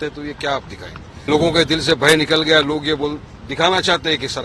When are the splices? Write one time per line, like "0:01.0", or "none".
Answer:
0:01.3